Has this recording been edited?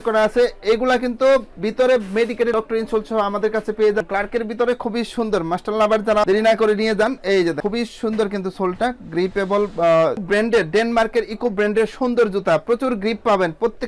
yes; 2 cuts; at 4.0 s, 10.2 s

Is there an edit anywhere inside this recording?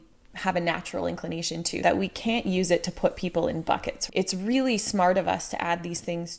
yes; 2 cuts; at 1.8 s, 4.0 s

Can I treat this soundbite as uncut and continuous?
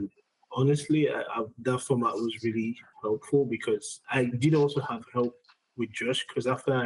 no; 1 cut; at 4.0 s

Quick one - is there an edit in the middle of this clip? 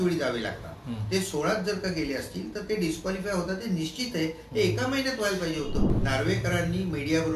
yes; 1 cut; at 5.9 s

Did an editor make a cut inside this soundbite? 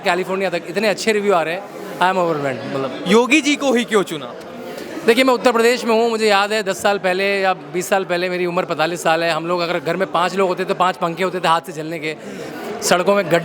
no; 0 cuts

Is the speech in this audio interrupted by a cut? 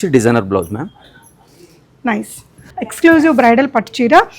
yes; 2 cuts; at 1.0 s, 2.7 s

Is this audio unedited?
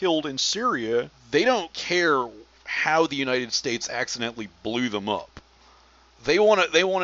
no; 1 cut; at 1.2 s

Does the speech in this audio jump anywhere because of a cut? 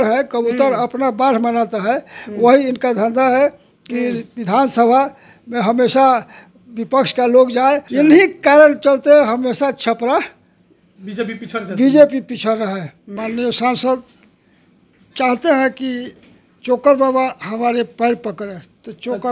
yes; 2 cuts; at 7.9 s, 13.1 s

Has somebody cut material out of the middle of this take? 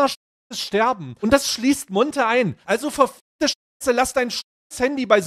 yes; 2 cuts; at 1.1 s, 2.6 s

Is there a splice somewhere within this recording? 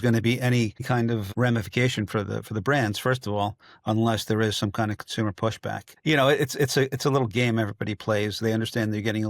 yes; 2 cuts; at 1.0 s, 5.9 s

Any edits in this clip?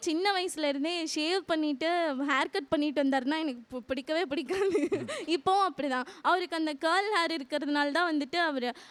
no; 0 cuts

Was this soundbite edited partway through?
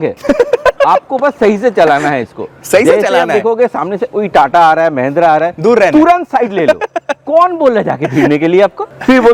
no; 0 cuts

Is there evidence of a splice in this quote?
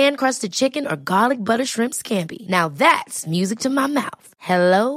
no; 0 cuts

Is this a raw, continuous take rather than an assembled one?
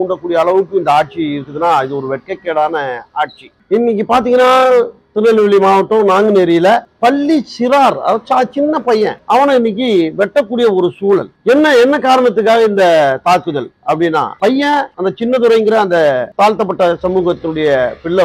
yes; 0 cuts

